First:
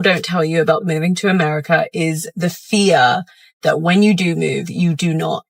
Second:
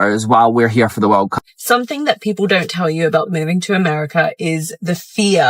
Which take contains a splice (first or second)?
second